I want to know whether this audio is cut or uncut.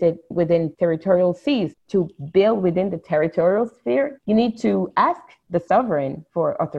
uncut